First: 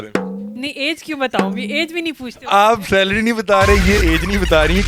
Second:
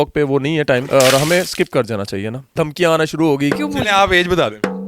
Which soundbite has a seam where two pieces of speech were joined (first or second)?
second